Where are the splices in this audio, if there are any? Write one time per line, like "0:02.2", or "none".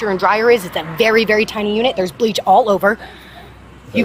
none